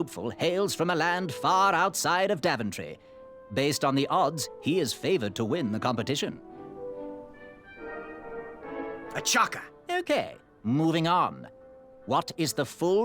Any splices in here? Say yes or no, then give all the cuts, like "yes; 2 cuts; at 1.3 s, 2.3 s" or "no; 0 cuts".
no; 0 cuts